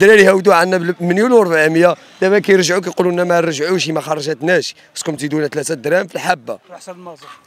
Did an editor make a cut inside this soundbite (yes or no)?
no